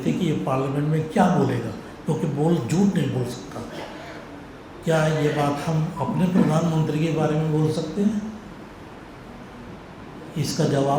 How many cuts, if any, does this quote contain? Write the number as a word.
zero